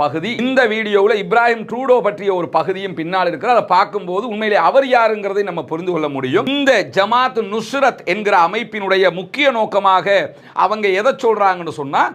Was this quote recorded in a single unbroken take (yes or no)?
no